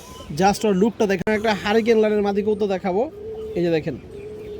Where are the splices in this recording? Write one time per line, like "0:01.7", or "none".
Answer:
0:00.9